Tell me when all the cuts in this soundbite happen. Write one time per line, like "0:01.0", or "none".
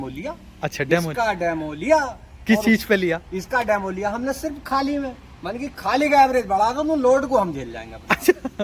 none